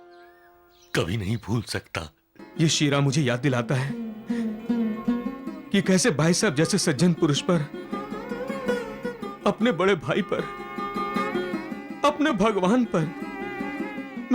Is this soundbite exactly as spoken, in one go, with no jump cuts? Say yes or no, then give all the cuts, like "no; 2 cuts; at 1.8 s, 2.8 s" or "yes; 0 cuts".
no; 1 cut; at 2.4 s